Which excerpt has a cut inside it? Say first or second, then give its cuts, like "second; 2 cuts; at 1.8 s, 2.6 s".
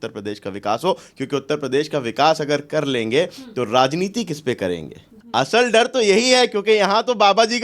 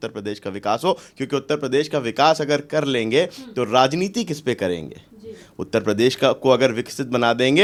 first; 1 cut; at 5.2 s